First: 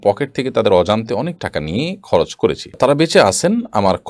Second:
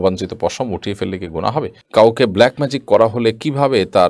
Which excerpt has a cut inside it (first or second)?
second